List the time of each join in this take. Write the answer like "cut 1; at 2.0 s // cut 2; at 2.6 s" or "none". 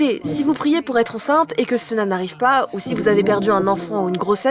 none